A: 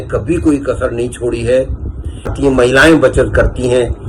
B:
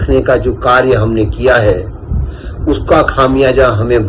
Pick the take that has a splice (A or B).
A